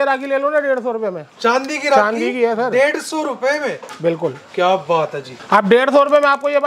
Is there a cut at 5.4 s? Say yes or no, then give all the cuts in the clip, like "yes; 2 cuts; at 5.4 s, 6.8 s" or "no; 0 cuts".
no; 0 cuts